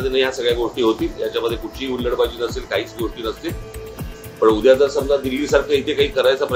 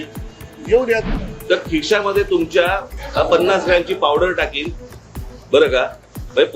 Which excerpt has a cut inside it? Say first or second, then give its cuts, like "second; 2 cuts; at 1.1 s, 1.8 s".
second; 2 cuts; at 1.2 s, 3.0 s